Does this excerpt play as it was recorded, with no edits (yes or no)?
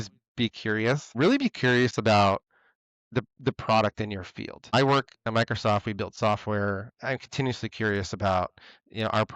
no